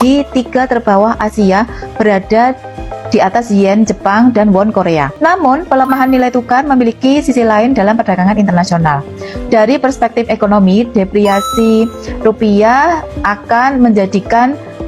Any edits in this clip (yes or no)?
yes